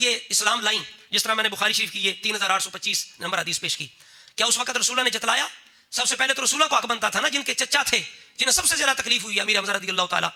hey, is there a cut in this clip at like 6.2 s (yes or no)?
no